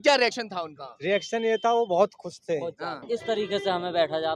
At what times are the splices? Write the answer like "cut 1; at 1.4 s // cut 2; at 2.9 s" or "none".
cut 1; at 2.9 s